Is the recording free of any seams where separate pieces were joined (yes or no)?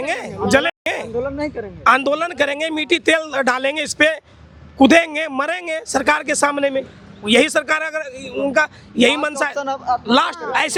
yes